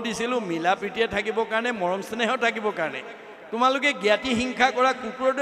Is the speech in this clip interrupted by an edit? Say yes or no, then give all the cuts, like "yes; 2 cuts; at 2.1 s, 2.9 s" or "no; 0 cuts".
no; 0 cuts